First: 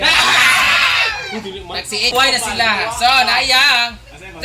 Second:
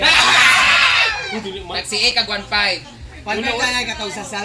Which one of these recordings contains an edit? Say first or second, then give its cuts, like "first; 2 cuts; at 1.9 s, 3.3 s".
first; 1 cut; at 2.1 s